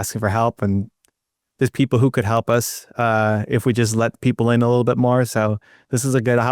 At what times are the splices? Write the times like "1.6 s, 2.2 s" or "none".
none